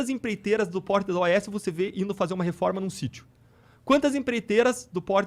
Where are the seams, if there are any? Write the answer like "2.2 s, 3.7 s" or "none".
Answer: none